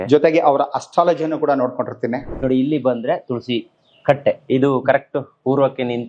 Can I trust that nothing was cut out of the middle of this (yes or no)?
no